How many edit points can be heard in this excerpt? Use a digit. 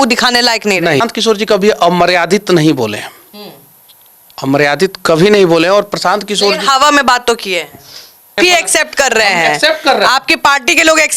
2